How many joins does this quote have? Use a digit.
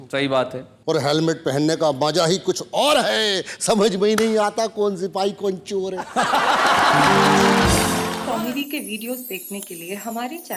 1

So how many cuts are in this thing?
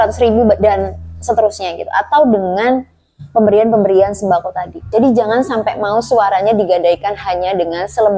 1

